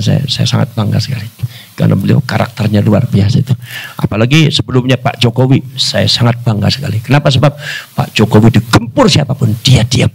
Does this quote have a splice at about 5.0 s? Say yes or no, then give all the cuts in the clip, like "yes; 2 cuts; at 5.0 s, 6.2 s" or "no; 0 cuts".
no; 0 cuts